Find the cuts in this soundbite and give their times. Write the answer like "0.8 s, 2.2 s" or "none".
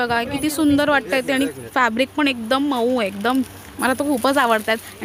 none